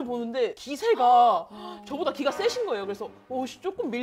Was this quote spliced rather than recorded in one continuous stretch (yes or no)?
no